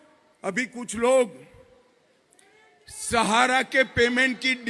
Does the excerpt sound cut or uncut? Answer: uncut